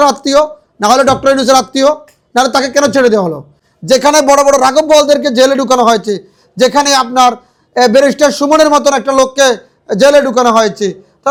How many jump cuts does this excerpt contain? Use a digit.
0